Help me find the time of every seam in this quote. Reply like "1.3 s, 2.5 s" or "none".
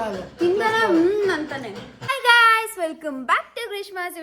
1.9 s